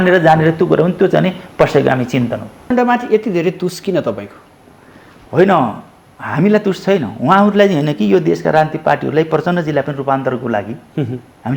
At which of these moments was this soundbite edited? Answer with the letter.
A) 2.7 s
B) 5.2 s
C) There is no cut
A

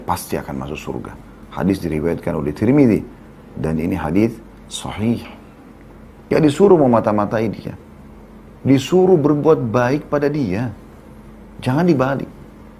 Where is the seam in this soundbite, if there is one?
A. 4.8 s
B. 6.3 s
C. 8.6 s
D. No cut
B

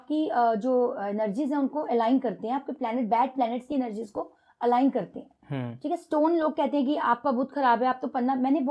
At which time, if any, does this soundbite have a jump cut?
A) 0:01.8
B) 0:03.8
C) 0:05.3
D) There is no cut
D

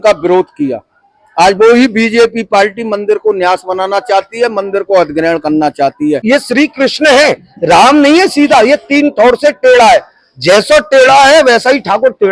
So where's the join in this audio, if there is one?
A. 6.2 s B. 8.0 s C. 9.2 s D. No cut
A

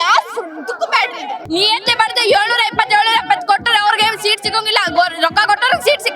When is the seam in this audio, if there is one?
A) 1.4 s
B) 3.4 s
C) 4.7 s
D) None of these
A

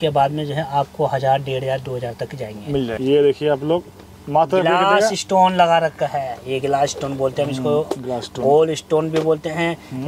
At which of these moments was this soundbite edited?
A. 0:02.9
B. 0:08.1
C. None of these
A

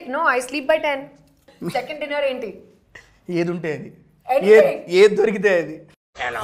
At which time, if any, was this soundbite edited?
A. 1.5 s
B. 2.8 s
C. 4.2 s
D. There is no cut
A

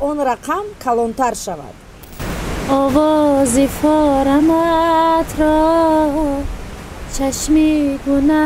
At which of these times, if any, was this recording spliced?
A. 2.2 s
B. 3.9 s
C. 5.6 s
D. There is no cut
A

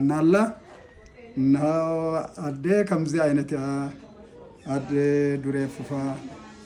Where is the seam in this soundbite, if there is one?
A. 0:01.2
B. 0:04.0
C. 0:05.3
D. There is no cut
D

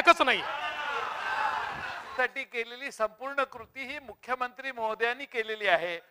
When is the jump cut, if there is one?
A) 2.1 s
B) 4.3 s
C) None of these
A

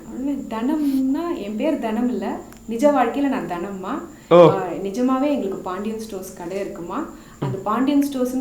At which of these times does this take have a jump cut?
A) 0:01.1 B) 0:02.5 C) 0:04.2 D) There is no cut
D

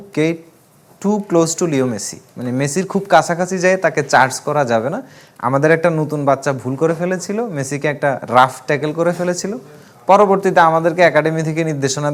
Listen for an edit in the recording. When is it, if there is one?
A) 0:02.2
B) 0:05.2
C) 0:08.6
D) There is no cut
D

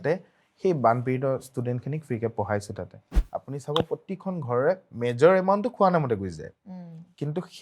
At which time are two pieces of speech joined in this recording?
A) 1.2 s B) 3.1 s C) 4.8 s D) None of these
B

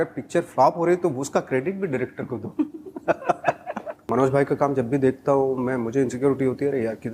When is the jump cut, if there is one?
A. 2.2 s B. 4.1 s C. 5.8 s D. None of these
B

